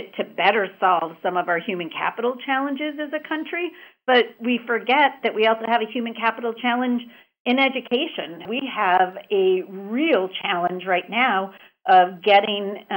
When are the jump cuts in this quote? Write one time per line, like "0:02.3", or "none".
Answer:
0:08.5